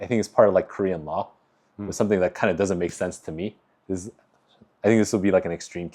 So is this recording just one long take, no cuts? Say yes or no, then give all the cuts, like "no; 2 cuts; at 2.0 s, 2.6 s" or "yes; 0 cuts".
yes; 0 cuts